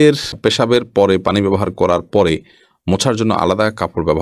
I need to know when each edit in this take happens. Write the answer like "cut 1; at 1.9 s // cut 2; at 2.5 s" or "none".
none

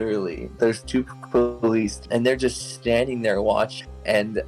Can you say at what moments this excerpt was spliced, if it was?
cut 1; at 2.0 s

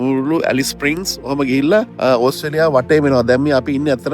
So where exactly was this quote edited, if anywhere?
cut 1; at 1.9 s

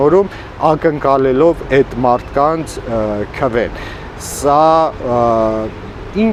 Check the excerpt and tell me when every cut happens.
none

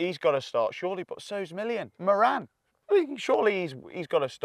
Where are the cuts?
cut 1; at 2.0 s

